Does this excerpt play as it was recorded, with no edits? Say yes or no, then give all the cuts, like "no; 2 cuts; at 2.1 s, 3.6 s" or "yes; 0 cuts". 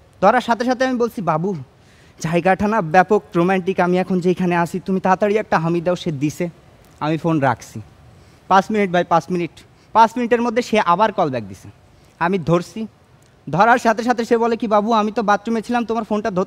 yes; 0 cuts